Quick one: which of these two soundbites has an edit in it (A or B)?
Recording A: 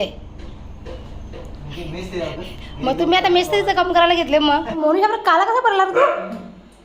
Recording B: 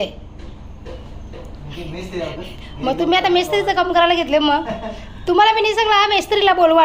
A